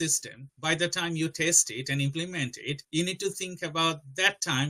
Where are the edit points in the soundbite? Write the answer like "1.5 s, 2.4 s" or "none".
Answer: none